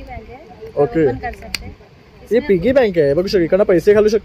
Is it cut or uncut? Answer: uncut